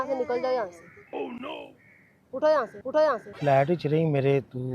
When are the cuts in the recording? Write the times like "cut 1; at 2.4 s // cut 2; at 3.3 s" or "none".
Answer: cut 1; at 3.3 s